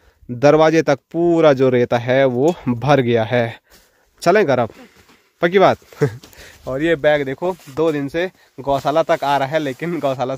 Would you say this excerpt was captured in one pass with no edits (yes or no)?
yes